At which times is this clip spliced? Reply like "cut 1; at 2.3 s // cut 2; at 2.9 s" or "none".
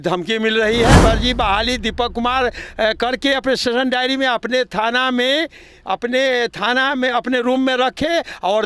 cut 1; at 1.0 s

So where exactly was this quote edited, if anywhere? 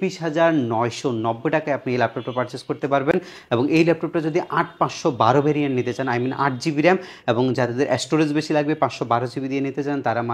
none

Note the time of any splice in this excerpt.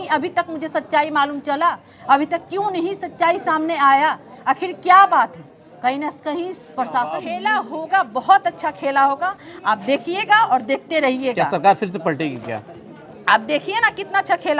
cut 1; at 7.3 s

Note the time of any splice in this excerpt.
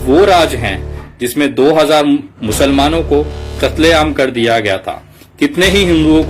none

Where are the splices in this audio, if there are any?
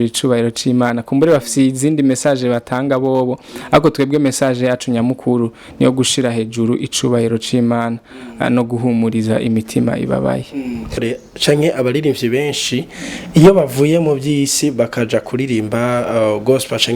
cut 1; at 11.0 s

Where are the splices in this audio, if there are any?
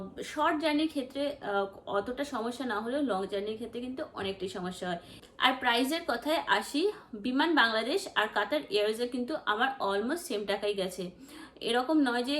cut 1; at 5.1 s

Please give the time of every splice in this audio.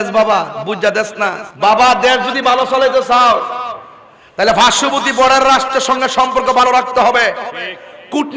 cut 1; at 1.4 s

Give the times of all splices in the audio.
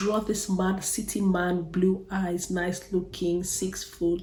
none

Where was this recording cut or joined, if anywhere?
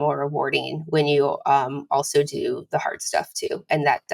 none

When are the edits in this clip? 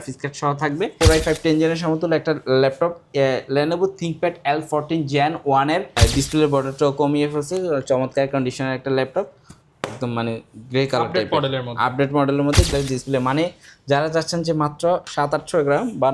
cut 1; at 0.9 s // cut 2; at 5.9 s // cut 3; at 12.7 s

